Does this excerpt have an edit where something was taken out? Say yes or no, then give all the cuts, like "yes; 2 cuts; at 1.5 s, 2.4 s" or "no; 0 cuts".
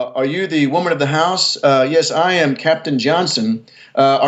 no; 0 cuts